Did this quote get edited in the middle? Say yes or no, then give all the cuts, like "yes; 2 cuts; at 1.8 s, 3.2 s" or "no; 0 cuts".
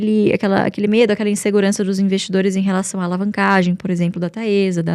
no; 0 cuts